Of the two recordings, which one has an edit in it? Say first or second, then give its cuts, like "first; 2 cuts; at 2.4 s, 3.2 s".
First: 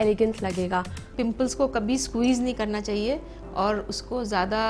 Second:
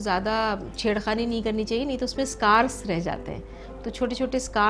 first; 1 cut; at 1.1 s